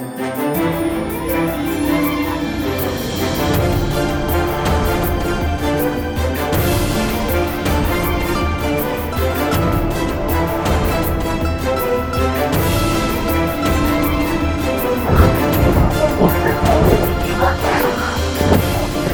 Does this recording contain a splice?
no; 0 cuts

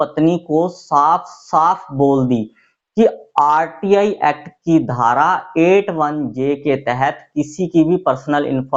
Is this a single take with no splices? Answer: yes; 0 cuts

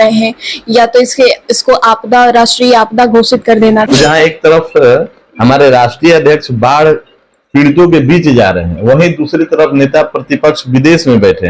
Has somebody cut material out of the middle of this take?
yes; 1 cut; at 3.9 s

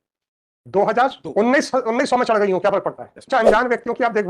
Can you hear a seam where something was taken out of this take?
yes; 1 cut; at 3.3 s

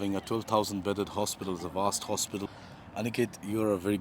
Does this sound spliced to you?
yes; 1 cut; at 2.5 s

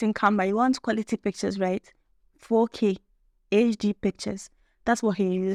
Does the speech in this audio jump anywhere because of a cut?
no; 0 cuts

